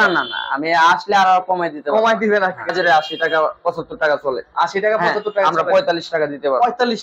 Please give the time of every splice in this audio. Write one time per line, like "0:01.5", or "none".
0:02.7